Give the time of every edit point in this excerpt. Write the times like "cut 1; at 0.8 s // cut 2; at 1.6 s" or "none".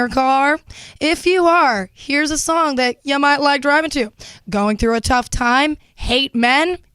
none